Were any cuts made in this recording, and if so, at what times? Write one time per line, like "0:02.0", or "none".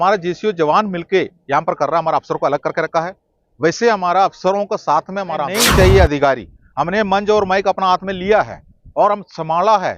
0:05.5